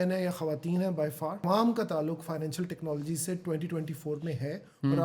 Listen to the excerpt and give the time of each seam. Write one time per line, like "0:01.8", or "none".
0:01.4